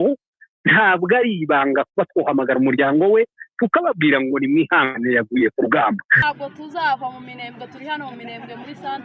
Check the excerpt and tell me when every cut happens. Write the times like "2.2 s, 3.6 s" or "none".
6.2 s